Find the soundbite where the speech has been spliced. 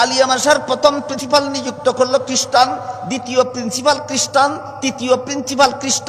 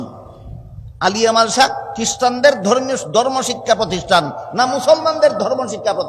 first; 1 cut; at 1.1 s

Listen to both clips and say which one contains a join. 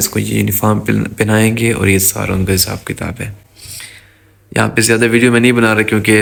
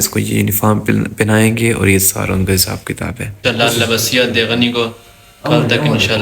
second; 1 cut; at 3.4 s

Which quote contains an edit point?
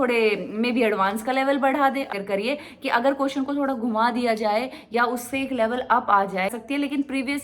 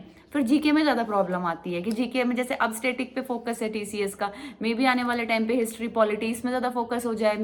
first; 2 cuts; at 2.1 s, 6.5 s

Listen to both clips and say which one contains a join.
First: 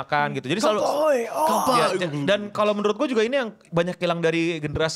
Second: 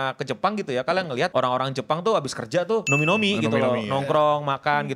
second; 2 cuts; at 1.3 s, 2.9 s

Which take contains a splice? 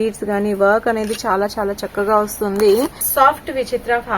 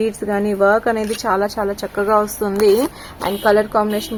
first; 1 cut; at 3.1 s

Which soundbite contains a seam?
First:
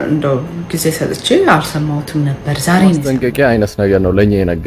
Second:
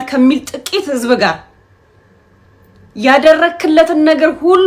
first; 1 cut; at 3.0 s

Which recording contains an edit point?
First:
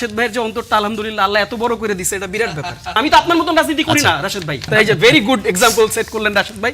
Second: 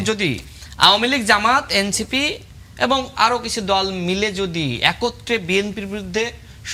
first; 2 cuts; at 2.9 s, 4.7 s

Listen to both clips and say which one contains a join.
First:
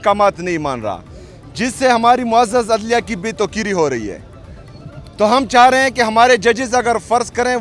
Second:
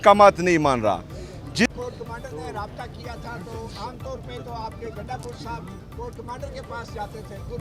second; 1 cut; at 1.7 s

